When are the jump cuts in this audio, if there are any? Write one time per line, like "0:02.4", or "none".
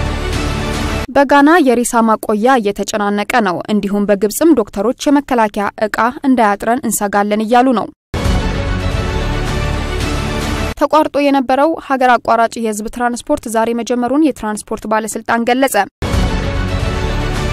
0:01.0
0:08.1
0:10.7
0:16.0